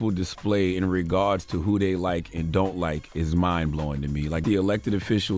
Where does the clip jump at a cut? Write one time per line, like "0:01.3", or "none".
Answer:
0:04.4